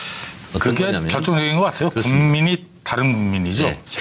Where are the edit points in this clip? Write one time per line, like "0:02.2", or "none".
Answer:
none